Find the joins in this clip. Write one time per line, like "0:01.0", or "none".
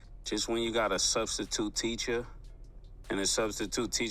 none